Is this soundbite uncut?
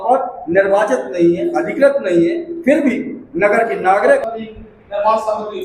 no; 1 cut; at 4.3 s

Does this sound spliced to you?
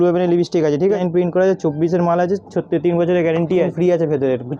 yes; 2 cuts; at 1.0 s, 3.7 s

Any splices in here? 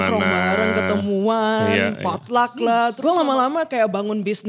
yes; 1 cut; at 3.0 s

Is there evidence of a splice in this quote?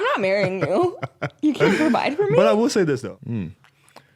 yes; 1 cut; at 3.1 s

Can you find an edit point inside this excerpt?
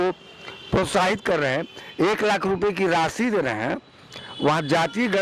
no; 0 cuts

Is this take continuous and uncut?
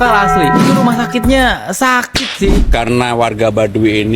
no; 1 cut; at 2.5 s

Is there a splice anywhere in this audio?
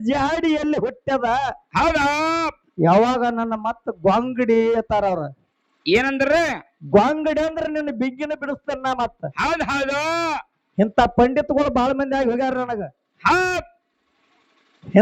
no; 0 cuts

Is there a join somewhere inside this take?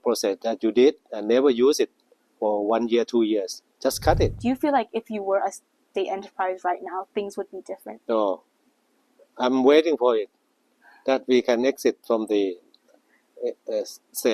yes; 2 cuts; at 4.4 s, 7.9 s

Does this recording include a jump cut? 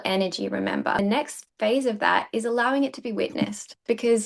yes; 1 cut; at 1.0 s

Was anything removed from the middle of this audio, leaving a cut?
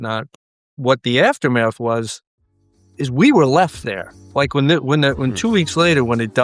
no; 0 cuts

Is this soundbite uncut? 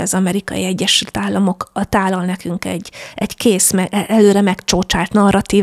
yes; 0 cuts

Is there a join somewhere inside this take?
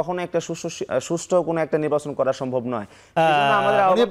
no; 0 cuts

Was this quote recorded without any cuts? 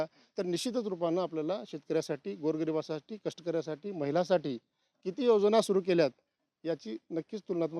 yes; 0 cuts

